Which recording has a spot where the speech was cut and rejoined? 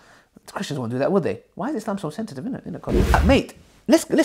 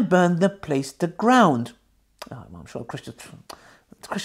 first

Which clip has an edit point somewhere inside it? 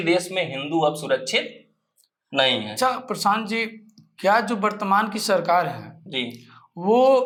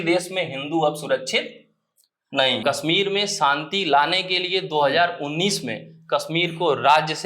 second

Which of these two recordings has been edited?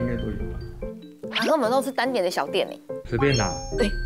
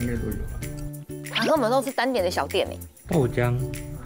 first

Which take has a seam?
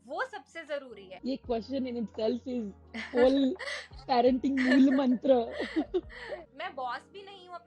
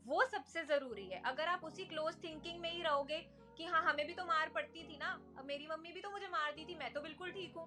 first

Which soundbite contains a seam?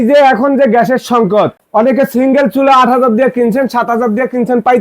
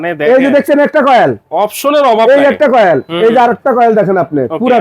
first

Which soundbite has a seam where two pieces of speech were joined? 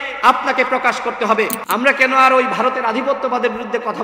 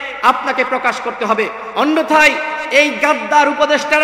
first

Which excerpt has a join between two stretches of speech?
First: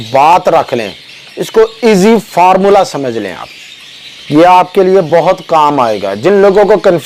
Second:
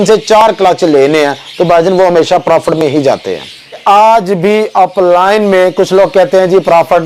second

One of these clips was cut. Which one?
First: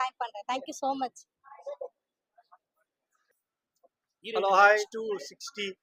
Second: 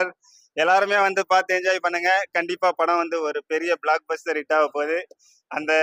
first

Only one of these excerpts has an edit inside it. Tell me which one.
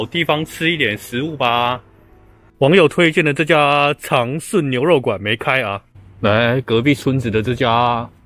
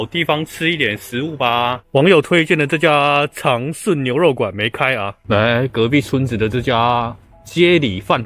second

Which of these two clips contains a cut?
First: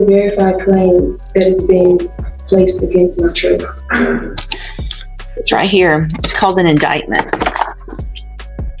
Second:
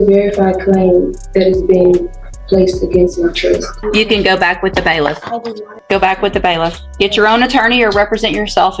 second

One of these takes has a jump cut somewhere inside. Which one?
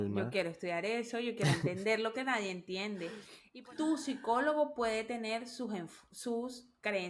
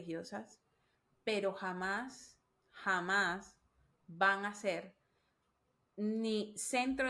first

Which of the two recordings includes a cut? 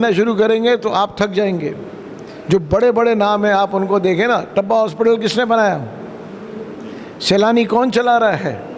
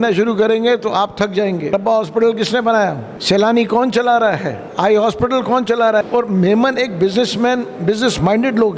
second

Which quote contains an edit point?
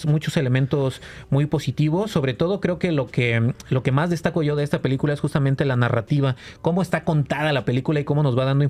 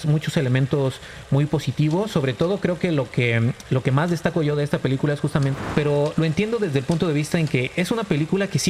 second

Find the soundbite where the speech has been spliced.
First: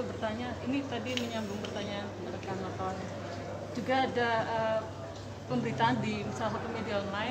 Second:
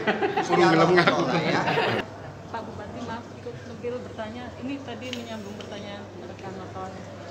second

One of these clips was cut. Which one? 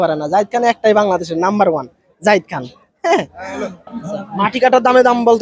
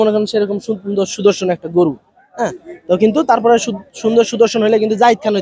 first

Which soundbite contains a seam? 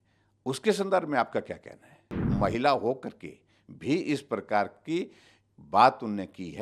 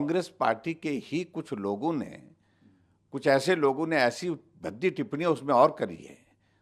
first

